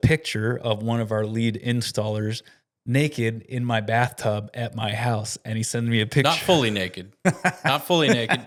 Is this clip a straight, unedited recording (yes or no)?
yes